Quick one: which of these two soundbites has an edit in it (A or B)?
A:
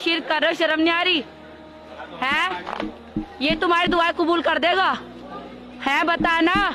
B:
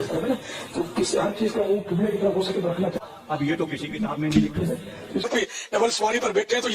B